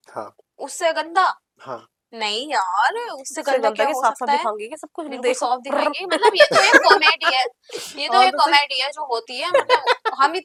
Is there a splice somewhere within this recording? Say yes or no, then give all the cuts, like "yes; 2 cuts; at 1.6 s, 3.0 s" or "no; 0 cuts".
no; 0 cuts